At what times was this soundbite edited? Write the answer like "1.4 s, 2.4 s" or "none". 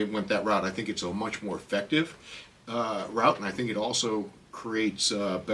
none